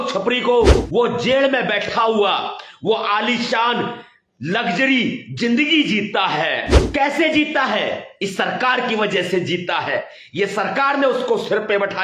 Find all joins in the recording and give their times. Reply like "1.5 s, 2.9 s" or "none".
0.8 s, 6.8 s